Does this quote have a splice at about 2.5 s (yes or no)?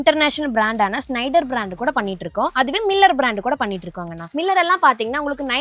no